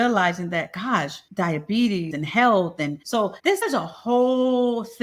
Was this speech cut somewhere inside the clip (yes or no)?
yes